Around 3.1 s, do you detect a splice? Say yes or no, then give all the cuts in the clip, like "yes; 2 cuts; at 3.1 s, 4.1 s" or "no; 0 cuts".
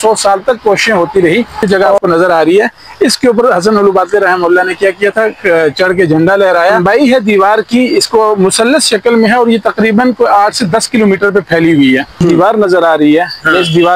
no; 3 cuts; at 1.6 s, 6.8 s, 12.3 s